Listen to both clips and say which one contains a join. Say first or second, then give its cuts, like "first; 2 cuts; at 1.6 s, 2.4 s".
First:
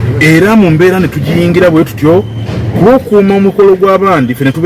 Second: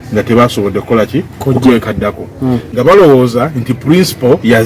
second; 1 cut; at 2.6 s